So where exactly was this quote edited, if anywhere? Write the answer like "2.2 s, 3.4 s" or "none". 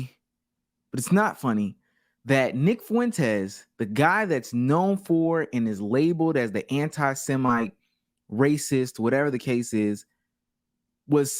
none